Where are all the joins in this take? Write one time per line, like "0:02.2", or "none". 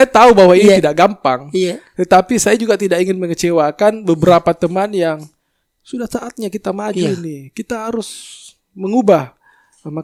none